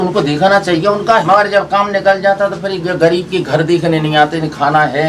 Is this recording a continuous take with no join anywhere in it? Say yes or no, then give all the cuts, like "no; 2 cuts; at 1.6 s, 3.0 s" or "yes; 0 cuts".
no; 1 cut; at 1.2 s